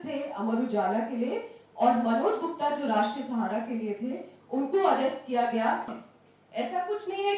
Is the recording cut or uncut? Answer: cut